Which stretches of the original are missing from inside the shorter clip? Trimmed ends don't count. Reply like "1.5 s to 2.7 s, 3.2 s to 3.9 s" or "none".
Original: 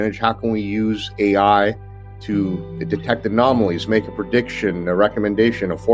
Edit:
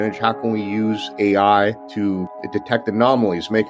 2.2 s to 2.6 s